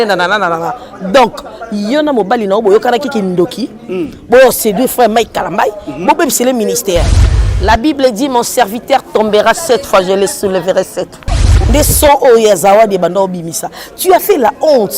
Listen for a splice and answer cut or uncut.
cut